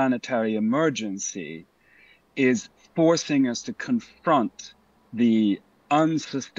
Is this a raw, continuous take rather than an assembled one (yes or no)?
yes